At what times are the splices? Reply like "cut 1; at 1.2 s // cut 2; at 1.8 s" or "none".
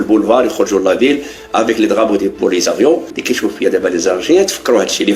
cut 1; at 3.2 s